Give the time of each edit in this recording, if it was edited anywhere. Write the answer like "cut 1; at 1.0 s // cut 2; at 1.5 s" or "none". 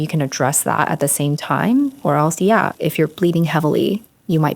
cut 1; at 2.7 s